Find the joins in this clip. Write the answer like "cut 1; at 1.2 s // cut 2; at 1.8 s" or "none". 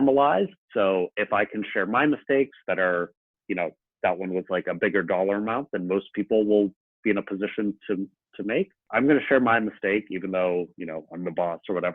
cut 1; at 8.8 s